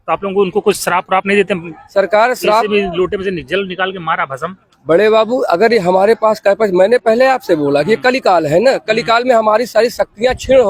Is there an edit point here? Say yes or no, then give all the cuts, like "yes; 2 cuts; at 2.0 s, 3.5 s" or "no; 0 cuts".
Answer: no; 0 cuts